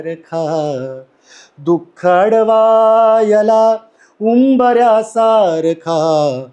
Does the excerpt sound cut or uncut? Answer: uncut